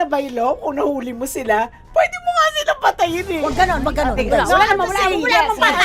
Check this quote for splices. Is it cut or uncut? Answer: cut